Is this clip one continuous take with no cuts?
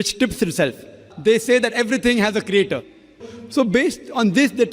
no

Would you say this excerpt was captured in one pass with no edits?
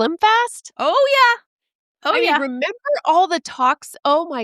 yes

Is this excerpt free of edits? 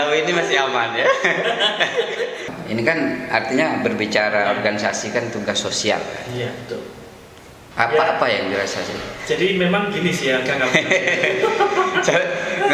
no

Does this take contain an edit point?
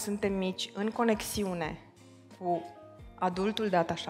no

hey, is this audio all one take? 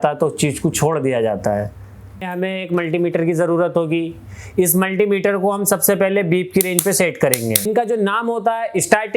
no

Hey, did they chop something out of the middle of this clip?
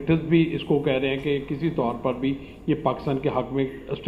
no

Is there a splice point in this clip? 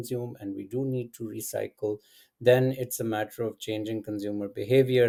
no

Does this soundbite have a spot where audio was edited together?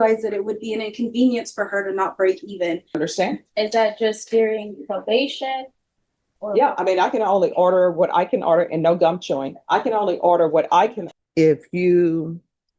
yes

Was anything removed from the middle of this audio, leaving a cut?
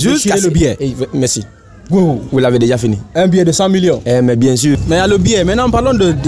yes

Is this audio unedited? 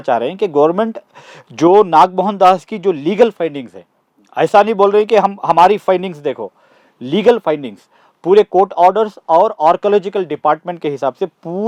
yes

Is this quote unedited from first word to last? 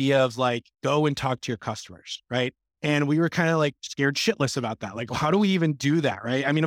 yes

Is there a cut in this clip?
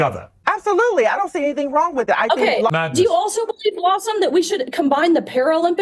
yes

